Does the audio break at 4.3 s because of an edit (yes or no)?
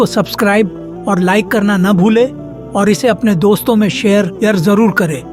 yes